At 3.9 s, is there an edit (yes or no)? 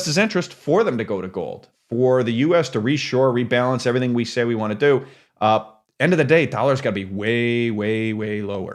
no